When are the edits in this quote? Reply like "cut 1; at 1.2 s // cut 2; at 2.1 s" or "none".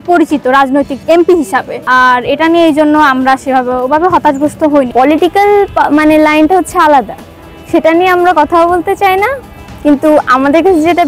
cut 1; at 1.0 s // cut 2; at 1.7 s // cut 3; at 4.9 s